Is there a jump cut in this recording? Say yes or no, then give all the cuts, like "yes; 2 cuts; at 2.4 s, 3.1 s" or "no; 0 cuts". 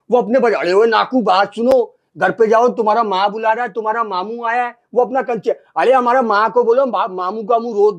no; 0 cuts